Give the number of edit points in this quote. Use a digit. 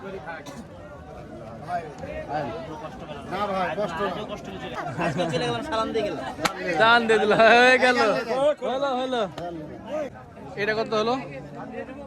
2